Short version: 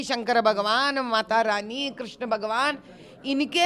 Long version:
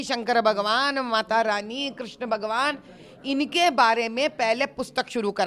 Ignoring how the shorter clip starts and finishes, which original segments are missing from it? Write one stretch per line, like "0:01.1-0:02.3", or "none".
none

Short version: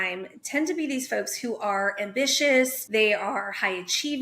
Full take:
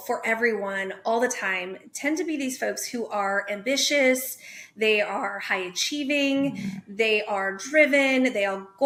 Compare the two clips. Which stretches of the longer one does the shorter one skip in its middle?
0:04.3-0:04.7

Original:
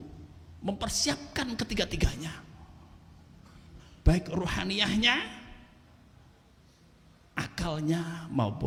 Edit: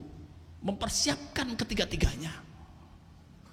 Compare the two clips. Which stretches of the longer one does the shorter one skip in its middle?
none

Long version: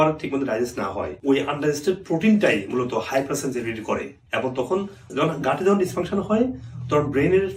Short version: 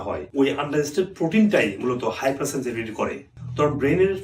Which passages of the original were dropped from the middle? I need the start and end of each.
0:04.2-0:06.7

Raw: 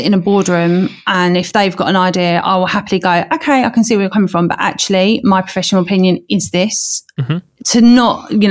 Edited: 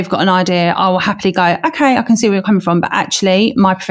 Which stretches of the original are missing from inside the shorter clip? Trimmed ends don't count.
none

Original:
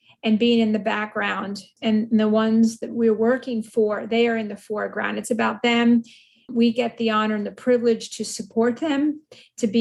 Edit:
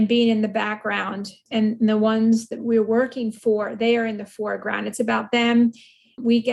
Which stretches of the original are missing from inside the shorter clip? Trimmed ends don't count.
none

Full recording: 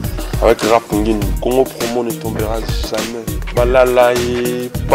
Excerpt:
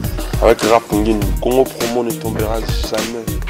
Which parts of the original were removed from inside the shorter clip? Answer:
none

